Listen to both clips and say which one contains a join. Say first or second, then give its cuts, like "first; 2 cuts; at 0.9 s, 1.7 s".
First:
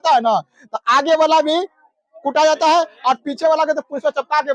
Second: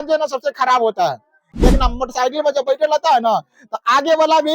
second; 1 cut; at 1.5 s